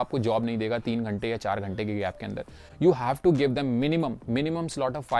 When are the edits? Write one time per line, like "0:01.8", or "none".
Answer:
none